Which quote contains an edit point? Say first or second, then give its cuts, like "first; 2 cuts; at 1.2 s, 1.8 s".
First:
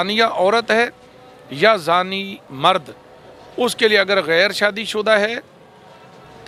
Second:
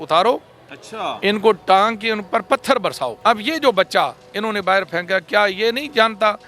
second; 1 cut; at 3.1 s